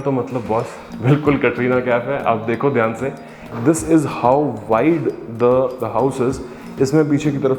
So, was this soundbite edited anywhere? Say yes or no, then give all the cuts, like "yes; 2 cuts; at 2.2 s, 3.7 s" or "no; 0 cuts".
yes; 1 cut; at 3.5 s